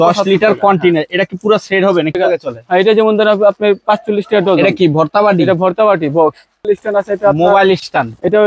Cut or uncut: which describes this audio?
cut